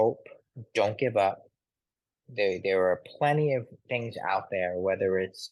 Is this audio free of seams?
yes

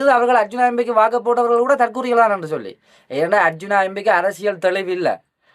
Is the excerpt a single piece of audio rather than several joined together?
yes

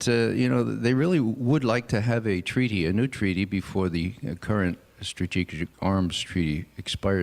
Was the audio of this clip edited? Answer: yes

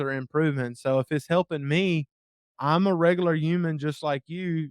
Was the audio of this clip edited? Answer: yes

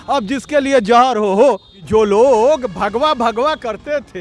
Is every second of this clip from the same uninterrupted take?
no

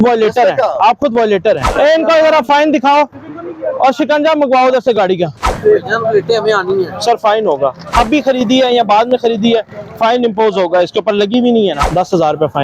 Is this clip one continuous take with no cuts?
no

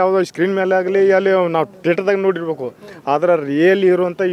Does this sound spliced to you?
yes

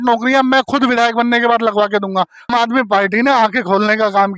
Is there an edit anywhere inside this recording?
yes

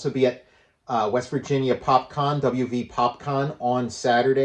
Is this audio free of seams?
yes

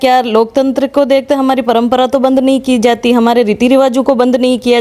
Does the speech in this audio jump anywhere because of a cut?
no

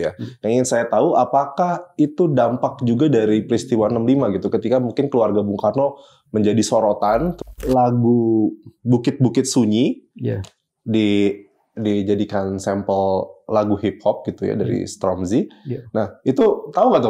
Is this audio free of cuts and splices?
no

